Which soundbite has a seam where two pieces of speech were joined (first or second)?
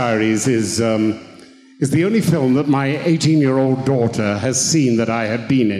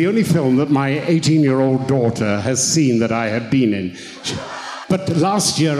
second